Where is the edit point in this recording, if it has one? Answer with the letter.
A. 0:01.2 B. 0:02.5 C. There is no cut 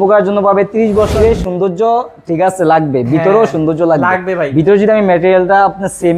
A